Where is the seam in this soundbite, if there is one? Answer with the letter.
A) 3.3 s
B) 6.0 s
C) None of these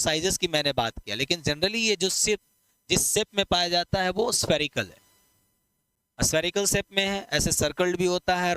C